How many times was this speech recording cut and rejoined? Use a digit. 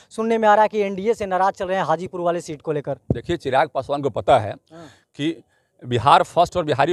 0